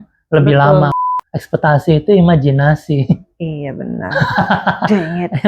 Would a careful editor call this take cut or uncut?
cut